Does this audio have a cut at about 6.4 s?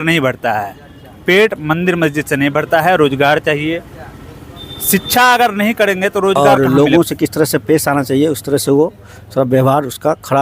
yes; 1 cut; at 6.4 s

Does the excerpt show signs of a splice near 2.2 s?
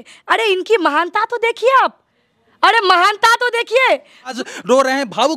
no; 1 cut; at 4.4 s

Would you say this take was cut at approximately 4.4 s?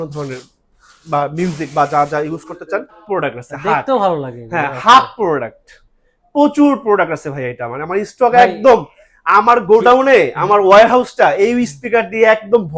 no; 1 cut; at 3.0 s

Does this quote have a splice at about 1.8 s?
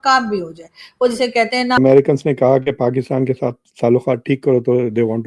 yes; 1 cut; at 1.8 s

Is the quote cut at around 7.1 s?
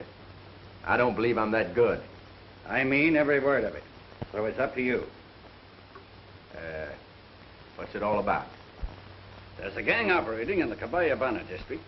no; 1 cut; at 3.0 s

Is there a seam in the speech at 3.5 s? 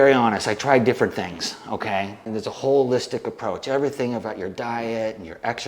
no; 1 cut; at 2.3 s

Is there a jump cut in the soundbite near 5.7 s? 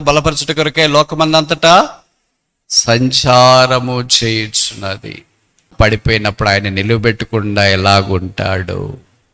yes; 1 cut; at 5.7 s

